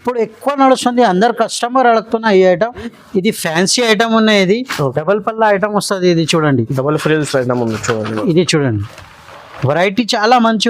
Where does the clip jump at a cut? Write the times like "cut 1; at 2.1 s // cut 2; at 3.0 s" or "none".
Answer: cut 1; at 2.9 s